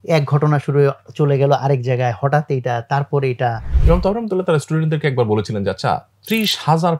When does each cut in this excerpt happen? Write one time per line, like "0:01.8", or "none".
0:03.7